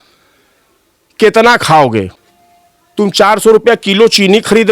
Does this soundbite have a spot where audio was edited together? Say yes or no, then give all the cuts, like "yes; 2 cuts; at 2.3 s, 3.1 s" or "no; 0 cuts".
yes; 1 cut; at 2.2 s